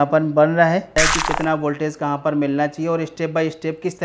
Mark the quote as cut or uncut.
cut